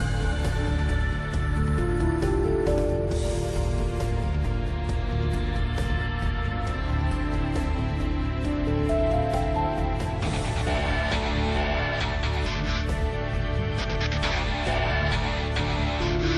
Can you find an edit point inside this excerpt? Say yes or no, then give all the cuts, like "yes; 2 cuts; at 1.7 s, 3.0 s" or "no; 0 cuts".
no; 0 cuts